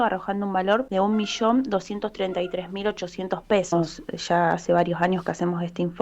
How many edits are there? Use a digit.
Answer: 2